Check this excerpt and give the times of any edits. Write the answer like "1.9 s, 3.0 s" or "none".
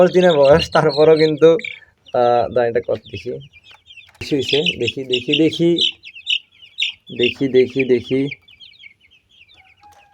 4.3 s

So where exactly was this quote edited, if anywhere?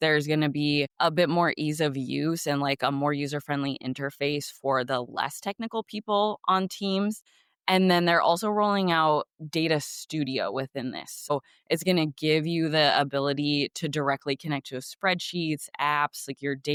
none

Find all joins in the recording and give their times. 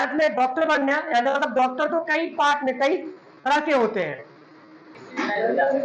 4.9 s

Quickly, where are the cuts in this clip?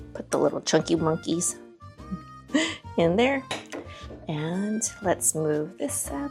none

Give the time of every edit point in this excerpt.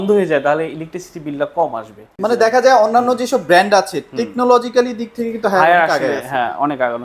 2.1 s

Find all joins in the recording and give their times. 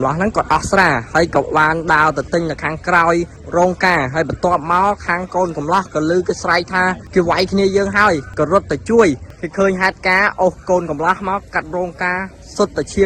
3.4 s, 7.0 s, 8.3 s, 9.3 s

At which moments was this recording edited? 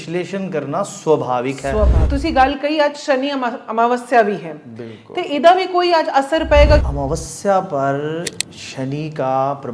2.0 s, 6.9 s

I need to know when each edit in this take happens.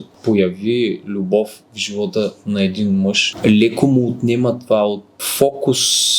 3.3 s, 5.1 s

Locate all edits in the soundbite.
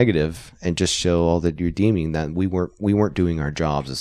none

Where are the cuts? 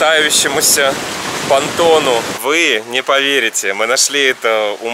2.3 s

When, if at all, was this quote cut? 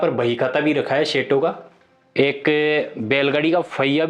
2.2 s

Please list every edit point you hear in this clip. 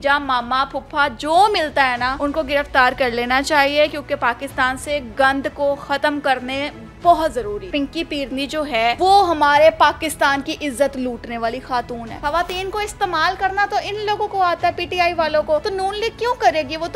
2.1 s, 7.6 s, 9.0 s, 12.2 s, 15.7 s

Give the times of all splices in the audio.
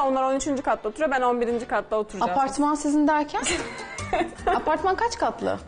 4.3 s

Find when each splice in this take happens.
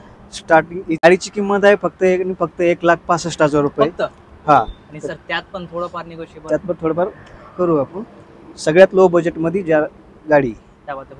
1.0 s

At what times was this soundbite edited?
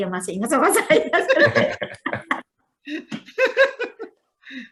none

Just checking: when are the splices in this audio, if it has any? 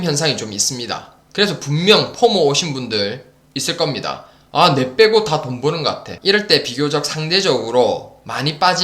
6.1 s

